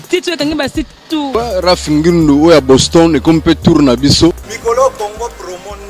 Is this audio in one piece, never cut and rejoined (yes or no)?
no